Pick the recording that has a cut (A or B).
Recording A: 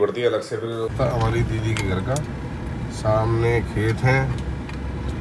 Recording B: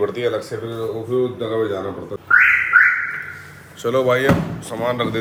A